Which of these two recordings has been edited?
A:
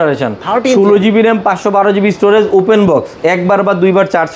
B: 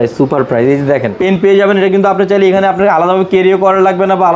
B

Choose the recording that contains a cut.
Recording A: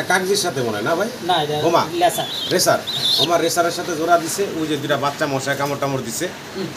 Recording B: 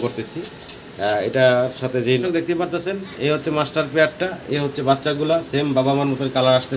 B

